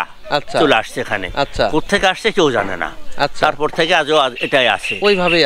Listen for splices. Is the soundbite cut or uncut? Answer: uncut